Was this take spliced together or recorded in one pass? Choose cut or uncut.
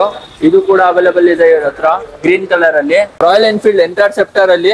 cut